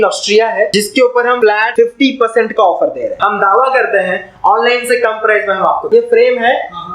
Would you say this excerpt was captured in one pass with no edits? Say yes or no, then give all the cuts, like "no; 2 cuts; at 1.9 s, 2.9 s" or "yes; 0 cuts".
no; 3 cuts; at 1.2 s, 3.1 s, 5.8 s